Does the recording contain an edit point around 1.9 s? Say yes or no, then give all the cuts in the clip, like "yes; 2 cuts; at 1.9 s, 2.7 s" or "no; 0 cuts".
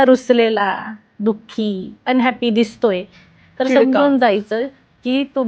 yes; 1 cut; at 1.9 s